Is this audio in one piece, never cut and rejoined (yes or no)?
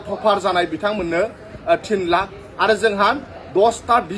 yes